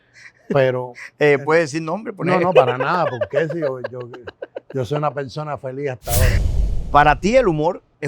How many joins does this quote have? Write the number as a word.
one